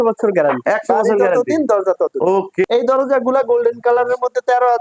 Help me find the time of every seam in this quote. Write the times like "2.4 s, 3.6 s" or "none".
2.7 s